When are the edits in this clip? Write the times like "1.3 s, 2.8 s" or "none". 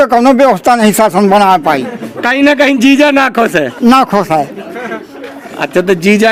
none

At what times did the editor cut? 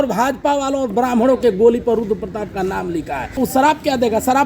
3.3 s

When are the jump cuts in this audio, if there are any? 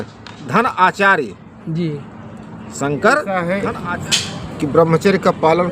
3.4 s

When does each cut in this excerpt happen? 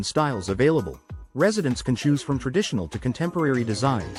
none

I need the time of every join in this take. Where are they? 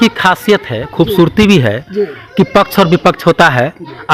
none

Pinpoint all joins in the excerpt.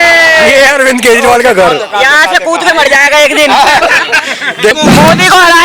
4.7 s

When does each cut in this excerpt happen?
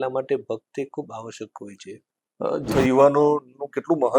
2.7 s

